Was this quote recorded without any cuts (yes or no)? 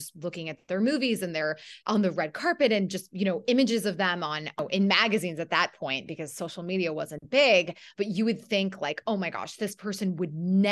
no